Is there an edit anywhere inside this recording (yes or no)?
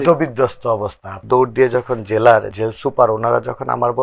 yes